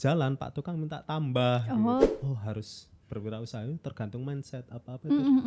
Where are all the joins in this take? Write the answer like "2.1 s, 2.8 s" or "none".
2.1 s